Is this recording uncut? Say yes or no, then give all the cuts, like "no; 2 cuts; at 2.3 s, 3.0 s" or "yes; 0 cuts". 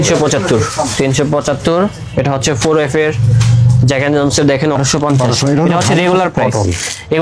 no; 1 cut; at 4.8 s